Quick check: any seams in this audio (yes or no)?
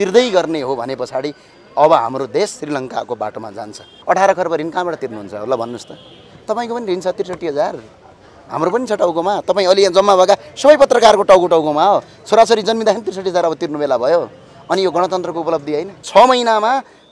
yes